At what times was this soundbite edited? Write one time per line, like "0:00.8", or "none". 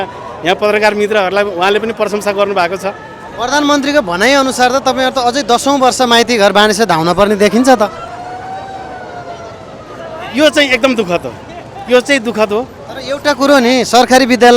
0:03.3